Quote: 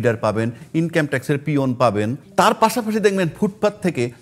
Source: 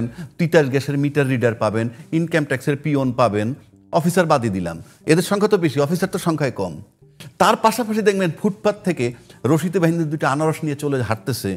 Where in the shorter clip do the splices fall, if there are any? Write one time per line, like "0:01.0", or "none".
0:02.2